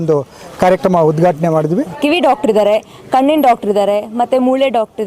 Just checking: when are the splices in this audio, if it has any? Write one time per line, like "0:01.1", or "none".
0:01.9

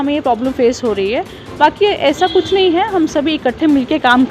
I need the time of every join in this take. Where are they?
none

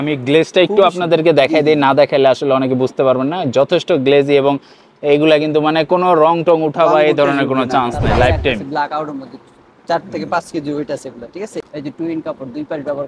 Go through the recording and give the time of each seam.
0:08.2
0:11.7

